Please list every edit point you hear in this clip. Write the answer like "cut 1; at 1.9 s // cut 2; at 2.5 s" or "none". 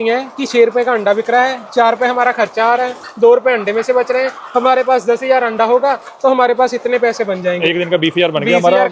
none